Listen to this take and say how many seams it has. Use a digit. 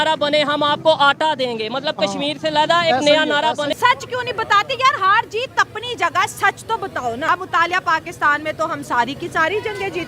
2